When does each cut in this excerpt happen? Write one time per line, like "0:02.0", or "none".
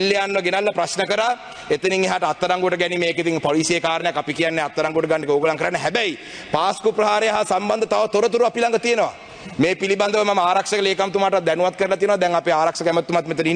none